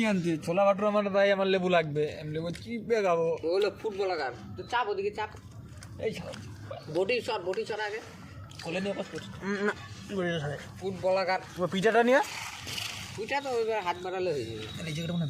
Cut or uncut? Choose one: uncut